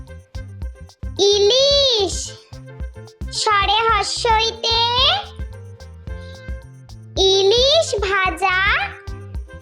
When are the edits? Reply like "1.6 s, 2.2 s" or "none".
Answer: 1.0 s